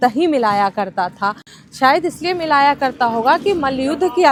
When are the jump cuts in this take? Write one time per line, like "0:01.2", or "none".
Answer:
none